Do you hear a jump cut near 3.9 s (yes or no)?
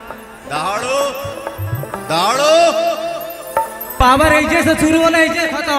yes